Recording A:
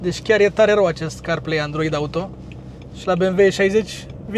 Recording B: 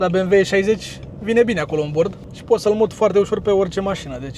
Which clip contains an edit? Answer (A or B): B